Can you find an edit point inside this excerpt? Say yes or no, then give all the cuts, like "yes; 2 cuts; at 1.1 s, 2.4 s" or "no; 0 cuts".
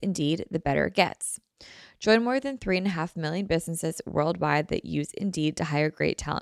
no; 0 cuts